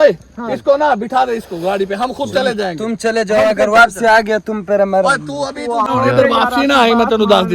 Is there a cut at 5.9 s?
yes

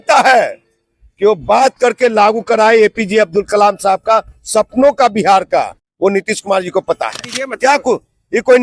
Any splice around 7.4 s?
yes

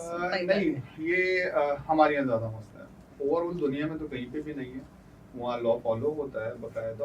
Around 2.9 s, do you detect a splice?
no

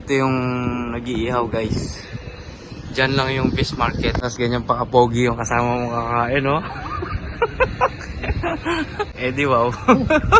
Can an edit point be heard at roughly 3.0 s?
no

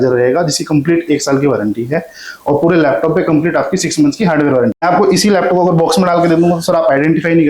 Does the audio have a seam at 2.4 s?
no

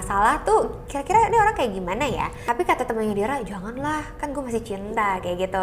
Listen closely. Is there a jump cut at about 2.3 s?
yes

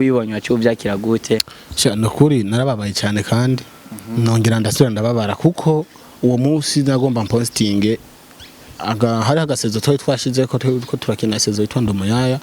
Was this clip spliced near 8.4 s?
no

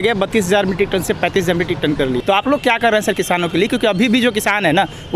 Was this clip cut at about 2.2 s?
yes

